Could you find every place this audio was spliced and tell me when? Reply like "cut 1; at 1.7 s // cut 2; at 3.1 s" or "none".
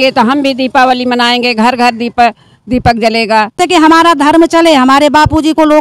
cut 1; at 3.6 s